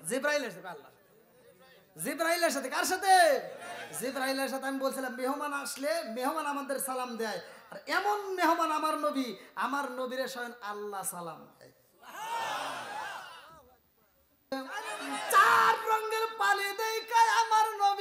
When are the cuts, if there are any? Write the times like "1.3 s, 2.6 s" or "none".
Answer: 14.5 s